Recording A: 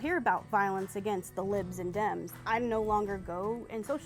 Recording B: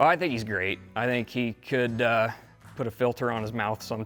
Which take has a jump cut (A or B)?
A